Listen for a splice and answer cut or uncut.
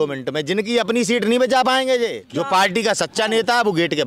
cut